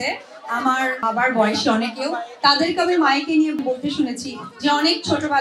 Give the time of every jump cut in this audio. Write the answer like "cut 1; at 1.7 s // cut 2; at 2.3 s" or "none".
cut 1; at 1.0 s // cut 2; at 3.6 s